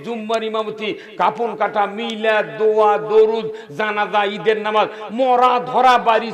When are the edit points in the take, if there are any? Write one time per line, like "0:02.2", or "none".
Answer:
none